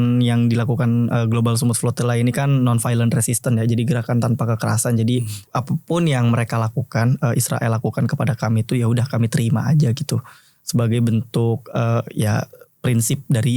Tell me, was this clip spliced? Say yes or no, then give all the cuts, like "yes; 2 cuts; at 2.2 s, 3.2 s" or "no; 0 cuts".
yes; 1 cut; at 5.4 s